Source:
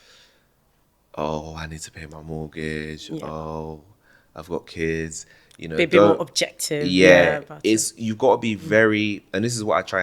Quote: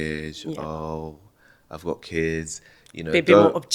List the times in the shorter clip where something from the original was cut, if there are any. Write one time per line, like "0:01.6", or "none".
none